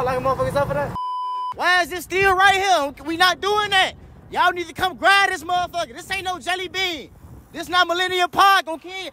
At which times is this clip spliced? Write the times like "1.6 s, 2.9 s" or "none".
1.1 s